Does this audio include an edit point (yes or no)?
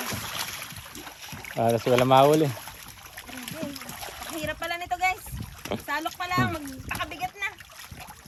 no